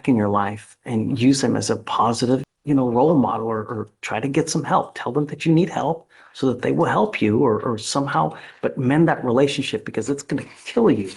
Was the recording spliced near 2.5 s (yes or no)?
yes